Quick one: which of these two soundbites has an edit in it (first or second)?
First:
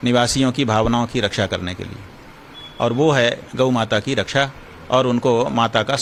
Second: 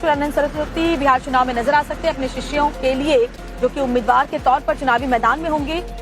second